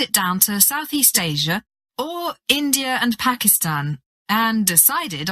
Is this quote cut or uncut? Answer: uncut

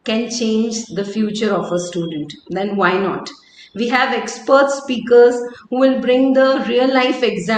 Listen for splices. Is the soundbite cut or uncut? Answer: uncut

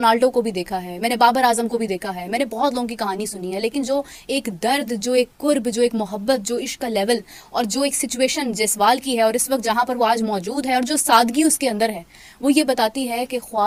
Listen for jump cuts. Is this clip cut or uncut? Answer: uncut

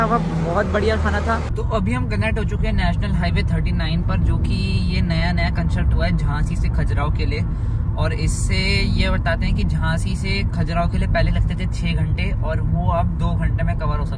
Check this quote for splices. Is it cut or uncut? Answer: cut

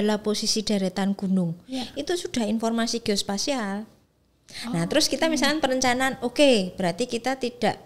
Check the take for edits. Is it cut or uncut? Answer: uncut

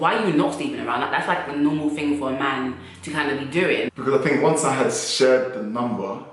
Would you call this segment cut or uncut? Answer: cut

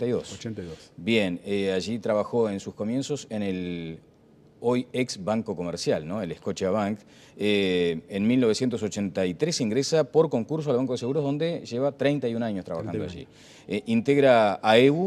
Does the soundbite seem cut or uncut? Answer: cut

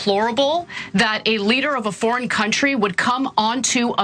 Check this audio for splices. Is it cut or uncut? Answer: uncut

